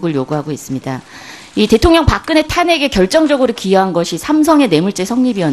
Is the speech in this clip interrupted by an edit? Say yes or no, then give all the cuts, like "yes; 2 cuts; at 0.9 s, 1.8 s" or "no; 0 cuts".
no; 0 cuts